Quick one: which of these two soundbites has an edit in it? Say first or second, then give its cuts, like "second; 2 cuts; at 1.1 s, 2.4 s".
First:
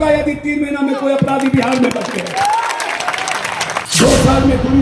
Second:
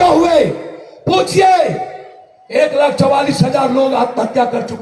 first; 1 cut; at 3.9 s